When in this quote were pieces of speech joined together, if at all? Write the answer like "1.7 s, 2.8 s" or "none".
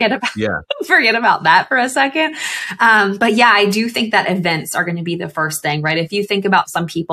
none